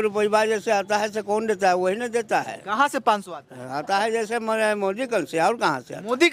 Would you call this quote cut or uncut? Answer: uncut